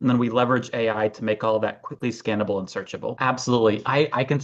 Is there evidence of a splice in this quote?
yes; 1 cut; at 3.2 s

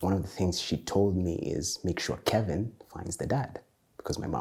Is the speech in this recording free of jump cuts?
yes; 0 cuts

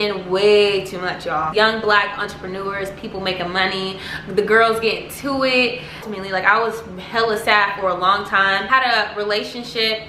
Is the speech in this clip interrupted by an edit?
yes; 3 cuts; at 1.5 s, 6.1 s, 8.7 s

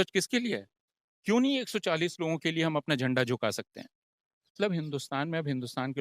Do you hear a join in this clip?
yes; 1 cut; at 4.5 s

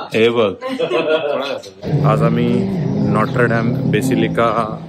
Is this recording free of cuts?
no; 1 cut; at 1.8 s

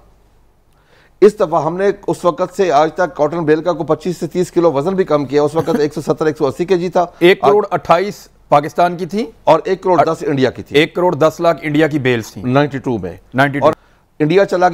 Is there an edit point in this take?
yes; 1 cut; at 13.7 s

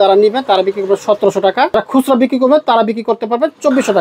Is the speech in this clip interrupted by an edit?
yes; 1 cut; at 1.7 s

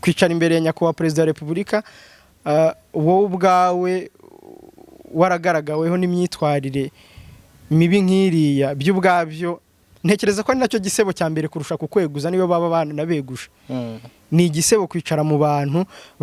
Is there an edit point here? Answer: no; 0 cuts

